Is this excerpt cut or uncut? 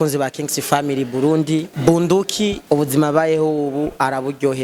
cut